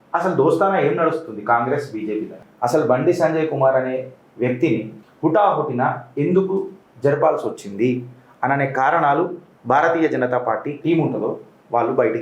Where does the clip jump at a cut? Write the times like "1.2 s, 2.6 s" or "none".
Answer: 2.4 s, 5.0 s, 10.8 s